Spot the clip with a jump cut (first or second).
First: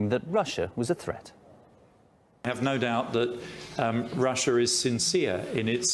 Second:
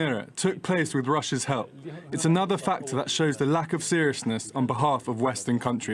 second